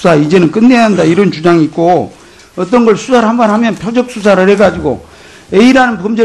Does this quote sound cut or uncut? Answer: uncut